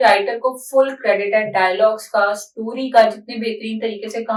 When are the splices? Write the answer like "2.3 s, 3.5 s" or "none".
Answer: none